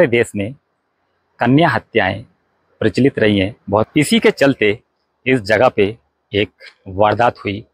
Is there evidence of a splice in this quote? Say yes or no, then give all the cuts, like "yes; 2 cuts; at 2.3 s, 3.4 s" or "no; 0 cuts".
yes; 1 cut; at 3.9 s